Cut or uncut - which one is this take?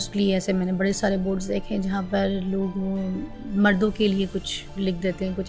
uncut